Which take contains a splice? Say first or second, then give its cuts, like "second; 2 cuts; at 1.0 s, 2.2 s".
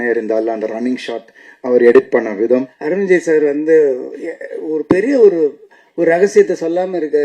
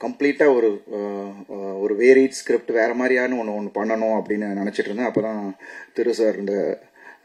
first; 1 cut; at 2.8 s